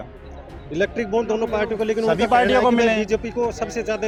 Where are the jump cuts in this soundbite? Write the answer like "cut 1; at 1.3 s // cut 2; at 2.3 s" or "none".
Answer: none